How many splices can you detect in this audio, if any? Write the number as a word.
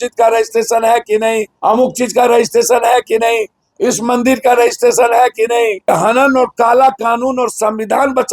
two